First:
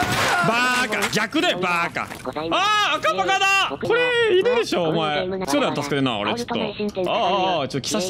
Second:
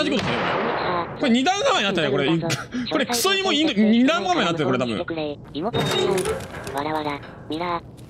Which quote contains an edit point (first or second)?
first